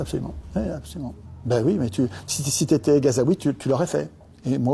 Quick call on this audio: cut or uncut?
cut